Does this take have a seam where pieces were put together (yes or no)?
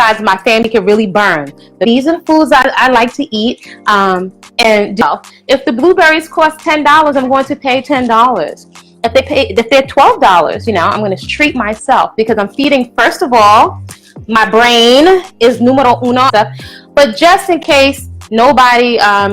yes